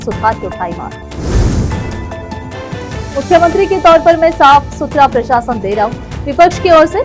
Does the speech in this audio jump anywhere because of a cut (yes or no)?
no